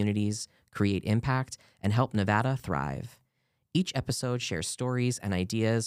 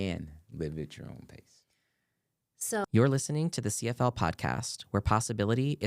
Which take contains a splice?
second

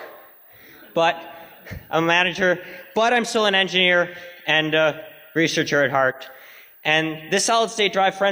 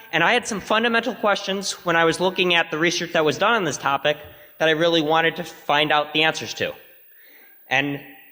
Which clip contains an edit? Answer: second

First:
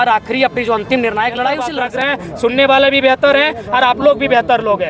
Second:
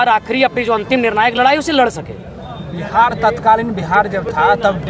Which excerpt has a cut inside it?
first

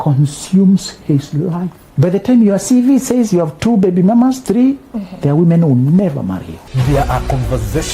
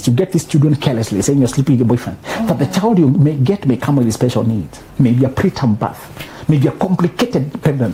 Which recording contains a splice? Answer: first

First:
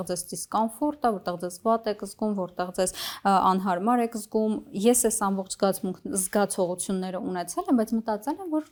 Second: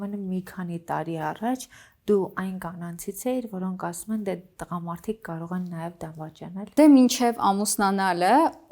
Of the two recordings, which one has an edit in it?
second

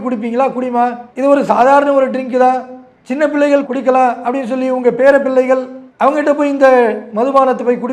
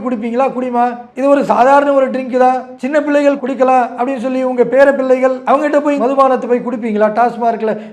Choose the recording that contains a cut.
second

